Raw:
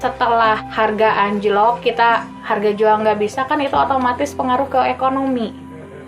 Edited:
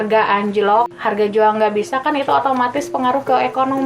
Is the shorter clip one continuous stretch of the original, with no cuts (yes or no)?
no